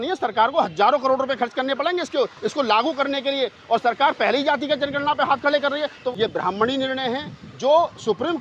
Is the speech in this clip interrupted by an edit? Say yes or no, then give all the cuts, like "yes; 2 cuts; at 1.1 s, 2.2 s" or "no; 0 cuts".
yes; 1 cut; at 6.0 s